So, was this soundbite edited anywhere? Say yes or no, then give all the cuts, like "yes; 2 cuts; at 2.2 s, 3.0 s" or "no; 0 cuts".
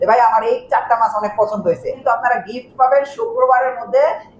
yes; 1 cut; at 2.0 s